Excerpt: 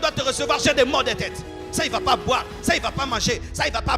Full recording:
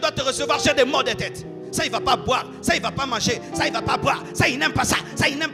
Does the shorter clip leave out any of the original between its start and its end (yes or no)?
no